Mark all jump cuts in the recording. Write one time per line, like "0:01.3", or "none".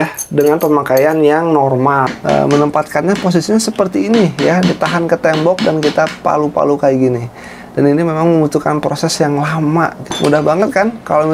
0:02.1
0:10.0